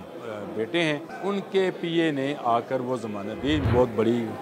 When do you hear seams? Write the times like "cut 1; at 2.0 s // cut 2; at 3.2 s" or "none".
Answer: cut 1; at 1.1 s // cut 2; at 3.7 s